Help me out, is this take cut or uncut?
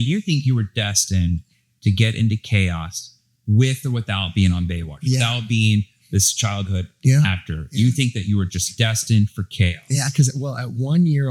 uncut